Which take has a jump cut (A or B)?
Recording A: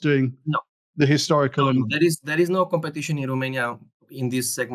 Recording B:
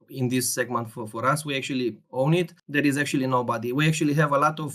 B